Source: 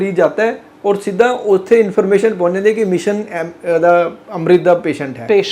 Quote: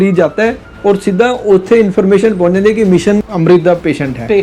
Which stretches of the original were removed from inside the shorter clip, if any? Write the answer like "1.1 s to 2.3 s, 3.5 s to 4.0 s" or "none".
3.3 s to 4.3 s